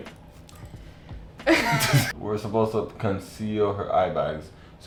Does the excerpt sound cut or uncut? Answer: uncut